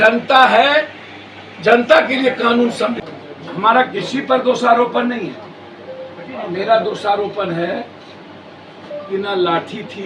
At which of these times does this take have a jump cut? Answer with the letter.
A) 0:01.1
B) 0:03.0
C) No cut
B